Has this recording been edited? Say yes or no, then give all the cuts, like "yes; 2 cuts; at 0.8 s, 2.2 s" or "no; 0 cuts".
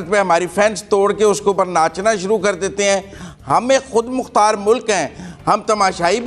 no; 0 cuts